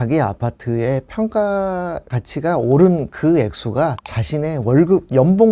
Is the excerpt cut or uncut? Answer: uncut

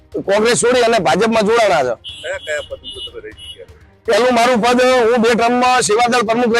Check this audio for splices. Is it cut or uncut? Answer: uncut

